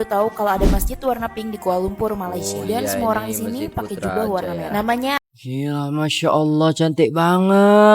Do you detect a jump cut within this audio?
yes; 1 cut; at 5.2 s

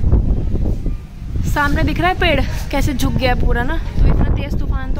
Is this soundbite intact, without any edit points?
yes; 0 cuts

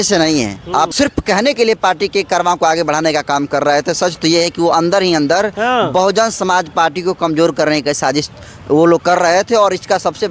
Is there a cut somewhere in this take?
yes; 1 cut; at 0.9 s

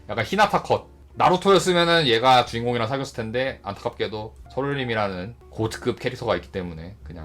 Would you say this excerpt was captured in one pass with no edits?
no; 1 cut; at 1.0 s

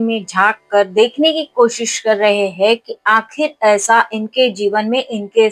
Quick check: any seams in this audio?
no; 0 cuts

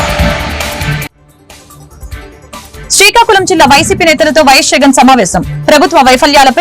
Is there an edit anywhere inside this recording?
no; 0 cuts

